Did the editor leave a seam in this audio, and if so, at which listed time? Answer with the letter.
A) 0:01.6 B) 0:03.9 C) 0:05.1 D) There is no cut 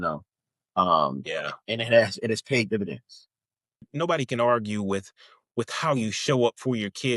B